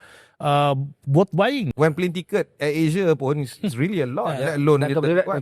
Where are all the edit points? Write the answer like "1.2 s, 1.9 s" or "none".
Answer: 1.7 s